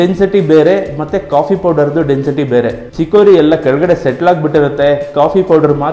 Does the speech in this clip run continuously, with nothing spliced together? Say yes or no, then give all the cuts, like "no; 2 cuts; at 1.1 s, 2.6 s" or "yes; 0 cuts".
no; 1 cut; at 2.8 s